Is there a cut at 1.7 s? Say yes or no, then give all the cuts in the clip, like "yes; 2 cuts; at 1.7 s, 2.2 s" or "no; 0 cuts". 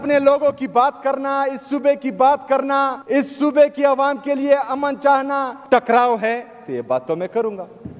no; 2 cuts; at 3.0 s, 5.5 s